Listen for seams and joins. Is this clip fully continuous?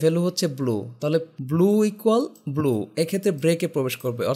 no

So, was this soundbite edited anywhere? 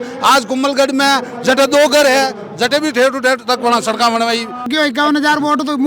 yes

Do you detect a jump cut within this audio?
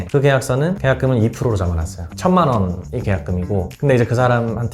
yes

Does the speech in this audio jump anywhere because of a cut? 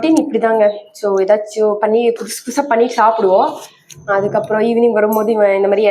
no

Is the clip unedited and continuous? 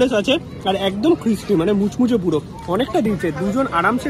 yes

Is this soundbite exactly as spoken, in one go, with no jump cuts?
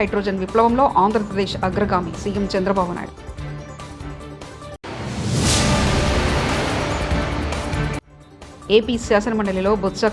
yes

